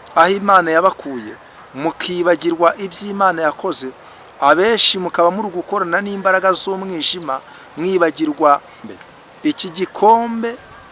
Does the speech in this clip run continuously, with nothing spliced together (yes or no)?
no